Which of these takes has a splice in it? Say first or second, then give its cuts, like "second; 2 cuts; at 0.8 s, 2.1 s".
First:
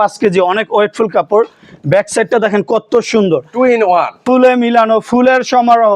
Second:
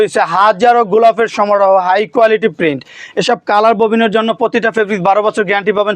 first; 1 cut; at 4.2 s